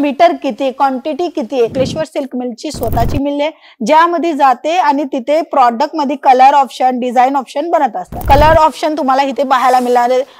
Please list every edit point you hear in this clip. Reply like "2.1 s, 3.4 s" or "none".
1.7 s, 8.1 s